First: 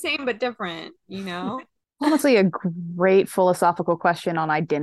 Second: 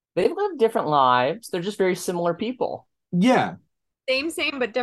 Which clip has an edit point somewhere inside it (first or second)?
first